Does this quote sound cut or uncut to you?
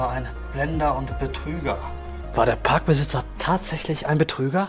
uncut